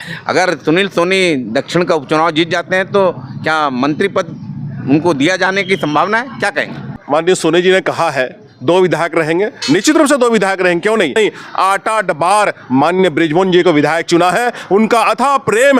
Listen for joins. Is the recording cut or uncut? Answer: cut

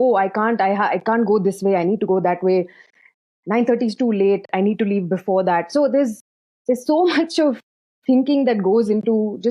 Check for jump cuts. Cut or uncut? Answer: uncut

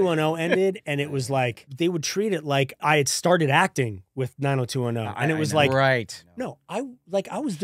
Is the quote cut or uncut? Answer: cut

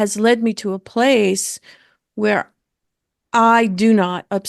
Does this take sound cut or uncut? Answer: uncut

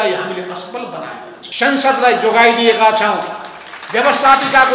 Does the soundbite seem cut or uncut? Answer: cut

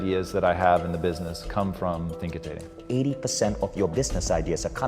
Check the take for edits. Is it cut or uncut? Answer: cut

